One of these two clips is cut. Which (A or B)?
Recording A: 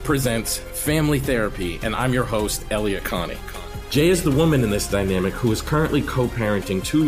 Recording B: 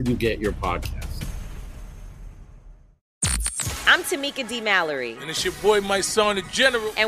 B